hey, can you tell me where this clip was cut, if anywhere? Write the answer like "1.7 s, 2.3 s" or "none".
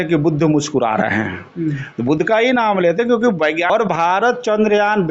3.7 s